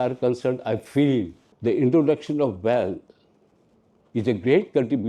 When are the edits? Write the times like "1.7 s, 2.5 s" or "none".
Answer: 1.4 s